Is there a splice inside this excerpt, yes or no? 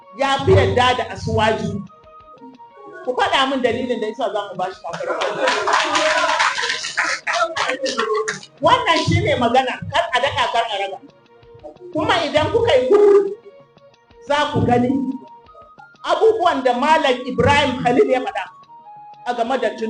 no